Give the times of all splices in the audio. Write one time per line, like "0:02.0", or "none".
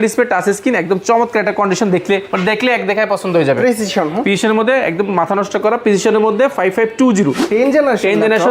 0:07.4